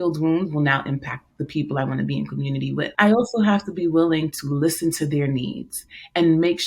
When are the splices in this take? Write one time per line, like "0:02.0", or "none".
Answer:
0:02.9